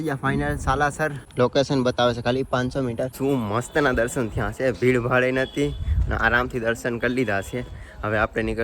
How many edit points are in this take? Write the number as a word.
two